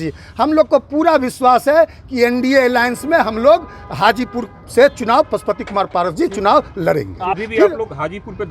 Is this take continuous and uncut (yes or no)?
no